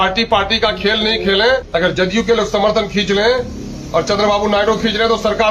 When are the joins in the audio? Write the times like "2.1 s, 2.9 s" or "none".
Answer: 1.7 s